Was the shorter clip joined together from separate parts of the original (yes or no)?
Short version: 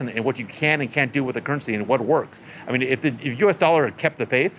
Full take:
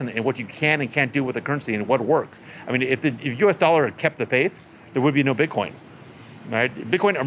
no